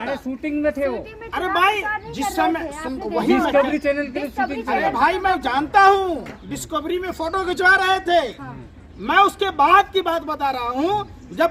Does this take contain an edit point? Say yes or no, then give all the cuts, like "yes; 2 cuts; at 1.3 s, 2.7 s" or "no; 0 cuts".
no; 0 cuts